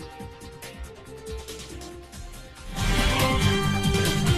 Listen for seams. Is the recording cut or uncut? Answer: uncut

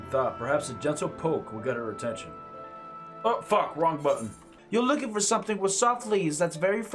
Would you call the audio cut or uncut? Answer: cut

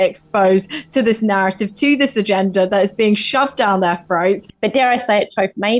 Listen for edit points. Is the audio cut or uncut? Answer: cut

